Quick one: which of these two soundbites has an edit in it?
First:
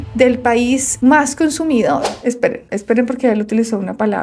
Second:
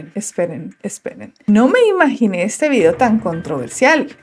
first; 1 cut; at 2.1 s

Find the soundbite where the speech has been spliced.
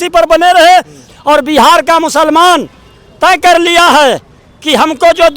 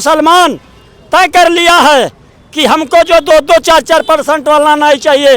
first; 1 cut; at 1.0 s

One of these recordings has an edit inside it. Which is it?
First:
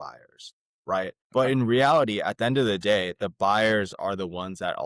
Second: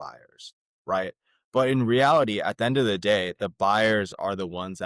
first; 1 cut; at 1.2 s

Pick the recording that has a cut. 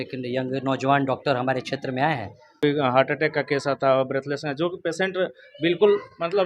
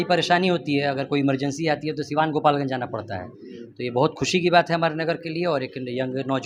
first; 1 cut; at 2.6 s

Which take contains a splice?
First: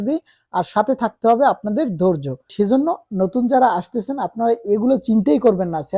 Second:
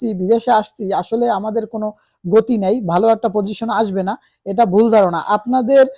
first; 1 cut; at 2.5 s

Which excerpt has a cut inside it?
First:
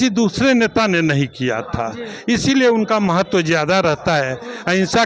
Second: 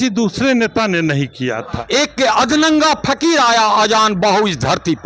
second; 1 cut; at 1.7 s

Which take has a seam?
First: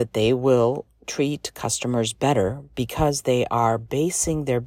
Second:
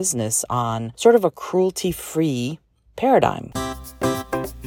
second; 2 cuts; at 0.9 s, 3.5 s

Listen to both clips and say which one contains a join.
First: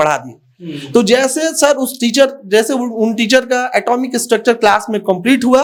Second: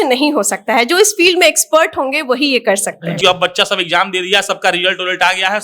second; 1 cut; at 3.2 s

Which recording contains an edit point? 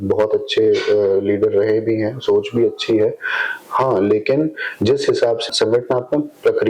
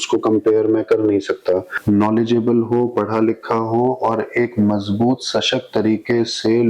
second; 1 cut; at 1.7 s

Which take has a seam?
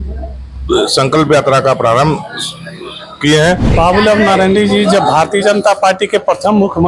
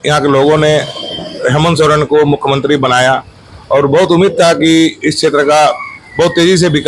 first; 1 cut; at 3.7 s

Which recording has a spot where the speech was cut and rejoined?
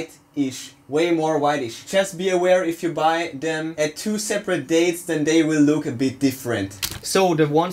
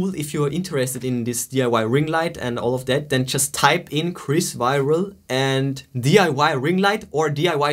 first; 3 cuts; at 1.8 s, 3.7 s, 6.7 s

